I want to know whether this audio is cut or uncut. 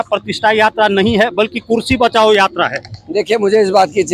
uncut